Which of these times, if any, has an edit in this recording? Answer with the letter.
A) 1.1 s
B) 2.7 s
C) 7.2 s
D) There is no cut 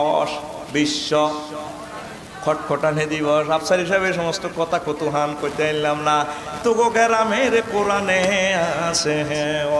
D